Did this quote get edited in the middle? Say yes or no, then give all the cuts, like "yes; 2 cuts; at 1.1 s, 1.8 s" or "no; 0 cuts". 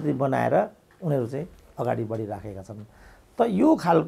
no; 0 cuts